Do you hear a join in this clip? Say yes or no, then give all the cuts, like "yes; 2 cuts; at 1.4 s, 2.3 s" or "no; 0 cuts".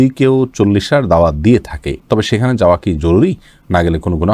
no; 0 cuts